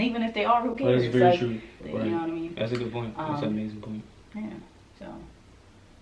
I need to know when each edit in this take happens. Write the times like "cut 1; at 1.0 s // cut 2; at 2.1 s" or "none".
cut 1; at 1.8 s // cut 2; at 4.2 s